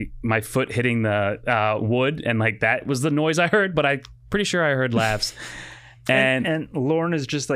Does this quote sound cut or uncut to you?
uncut